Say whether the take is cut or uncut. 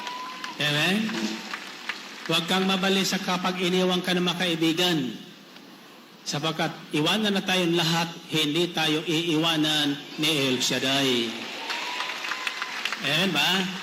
uncut